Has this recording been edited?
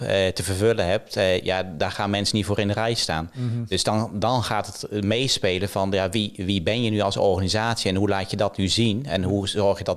no; 0 cuts

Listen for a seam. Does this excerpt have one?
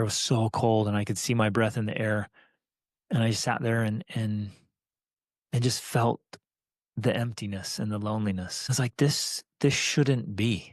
no; 0 cuts

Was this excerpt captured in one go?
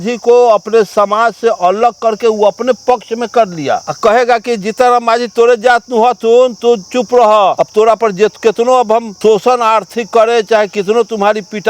no; 2 cuts; at 7.6 s, 9.1 s

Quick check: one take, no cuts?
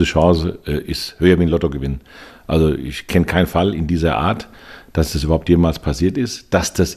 yes; 0 cuts

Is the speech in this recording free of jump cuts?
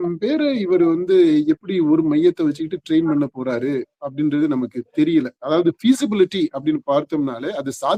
yes; 0 cuts

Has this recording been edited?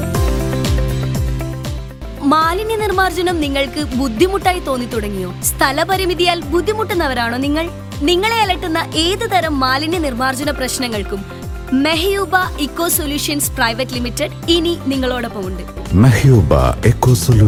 no; 0 cuts

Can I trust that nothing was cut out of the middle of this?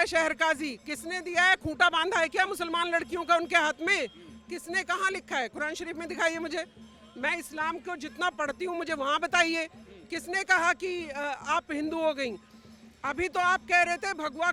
yes; 0 cuts

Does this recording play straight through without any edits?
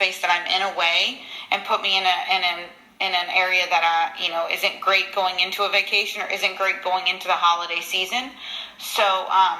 yes; 0 cuts

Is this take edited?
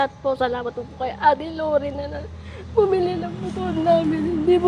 no; 0 cuts

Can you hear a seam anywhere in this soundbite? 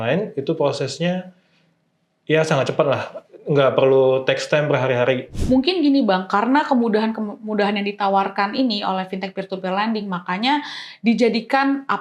yes; 1 cut; at 5.3 s

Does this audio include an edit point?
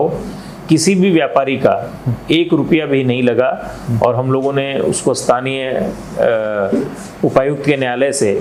no; 0 cuts

